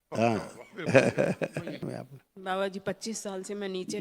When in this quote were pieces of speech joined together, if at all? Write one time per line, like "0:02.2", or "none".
0:01.9